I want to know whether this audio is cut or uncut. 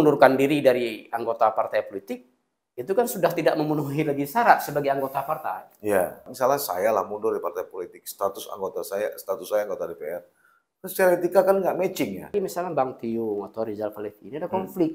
cut